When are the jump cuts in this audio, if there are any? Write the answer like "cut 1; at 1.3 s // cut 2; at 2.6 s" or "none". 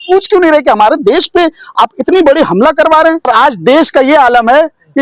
cut 1; at 3.3 s